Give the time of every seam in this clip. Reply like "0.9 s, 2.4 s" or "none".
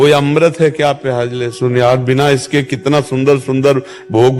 none